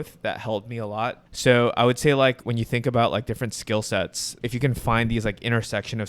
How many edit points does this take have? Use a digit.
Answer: 3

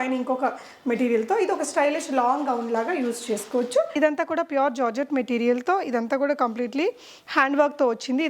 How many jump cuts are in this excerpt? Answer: 1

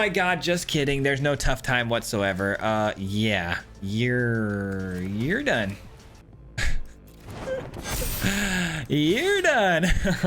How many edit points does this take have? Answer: 1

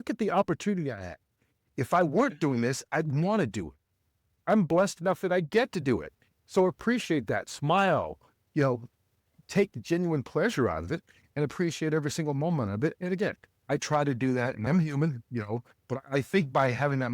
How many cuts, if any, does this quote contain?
1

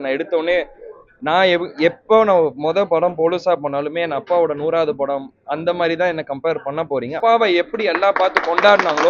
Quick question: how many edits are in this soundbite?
1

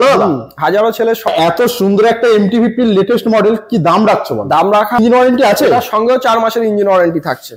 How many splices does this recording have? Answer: 2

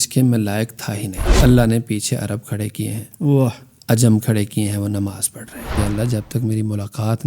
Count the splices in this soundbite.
2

